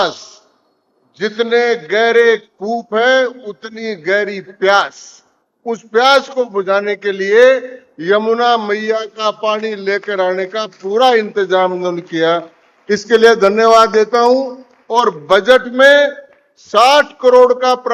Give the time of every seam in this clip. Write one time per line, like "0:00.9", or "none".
none